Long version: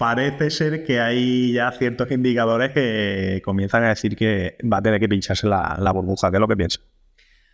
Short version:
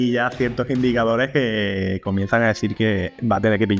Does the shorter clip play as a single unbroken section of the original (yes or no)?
yes